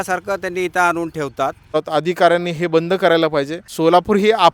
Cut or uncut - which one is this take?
cut